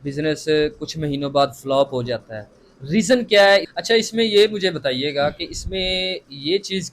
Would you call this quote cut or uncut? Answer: cut